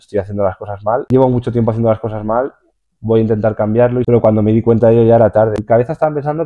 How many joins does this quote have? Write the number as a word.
three